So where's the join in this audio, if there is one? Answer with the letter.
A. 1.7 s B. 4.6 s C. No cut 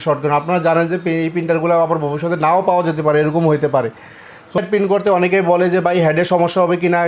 B